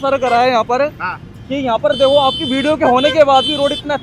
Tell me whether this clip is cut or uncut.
uncut